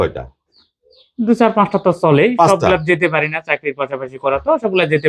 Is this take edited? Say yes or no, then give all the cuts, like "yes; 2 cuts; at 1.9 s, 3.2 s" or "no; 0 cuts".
no; 0 cuts